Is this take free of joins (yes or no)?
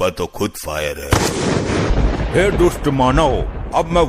no